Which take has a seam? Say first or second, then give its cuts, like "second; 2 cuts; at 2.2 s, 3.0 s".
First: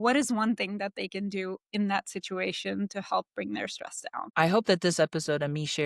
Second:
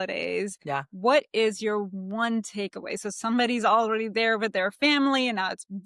first; 1 cut; at 4.3 s